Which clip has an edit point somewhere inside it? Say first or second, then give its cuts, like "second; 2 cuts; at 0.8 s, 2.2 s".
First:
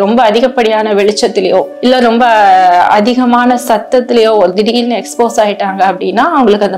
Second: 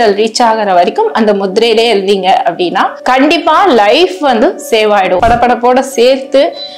second; 1 cut; at 5.2 s